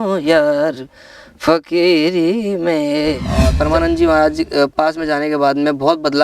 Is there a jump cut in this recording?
yes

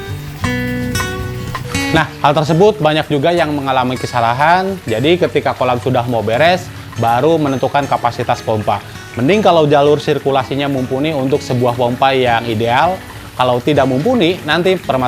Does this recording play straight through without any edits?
yes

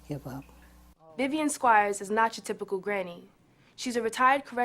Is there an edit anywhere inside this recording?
yes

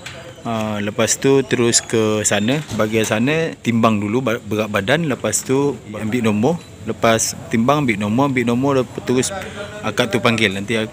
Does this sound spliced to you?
yes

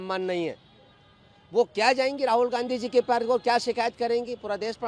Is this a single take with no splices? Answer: yes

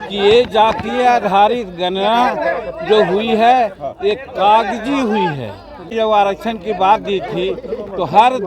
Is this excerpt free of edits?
no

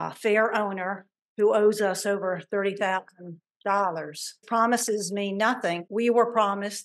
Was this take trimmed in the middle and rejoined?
yes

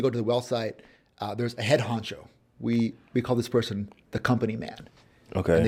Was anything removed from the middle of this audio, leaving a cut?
no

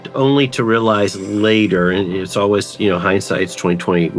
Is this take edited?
no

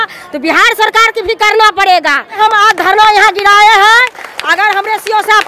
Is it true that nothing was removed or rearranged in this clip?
no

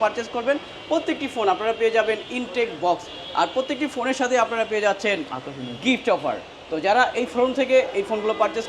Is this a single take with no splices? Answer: yes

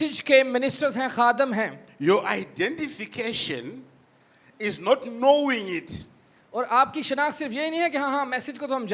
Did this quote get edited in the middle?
no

